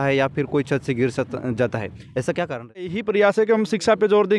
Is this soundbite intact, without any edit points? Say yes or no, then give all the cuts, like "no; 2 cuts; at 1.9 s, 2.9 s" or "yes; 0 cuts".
no; 1 cut; at 3.0 s